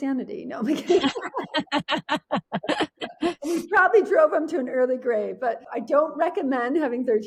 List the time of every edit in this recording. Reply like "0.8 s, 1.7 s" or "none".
none